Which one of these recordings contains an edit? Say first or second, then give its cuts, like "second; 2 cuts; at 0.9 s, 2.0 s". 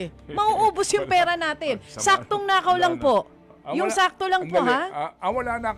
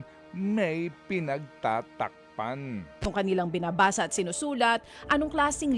second; 1 cut; at 3.0 s